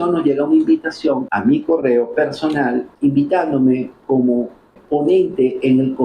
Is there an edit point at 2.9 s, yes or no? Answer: yes